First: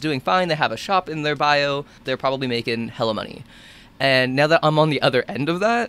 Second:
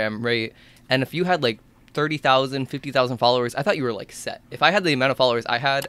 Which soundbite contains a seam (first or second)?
first